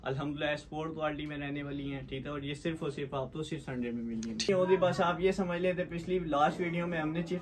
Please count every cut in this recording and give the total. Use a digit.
1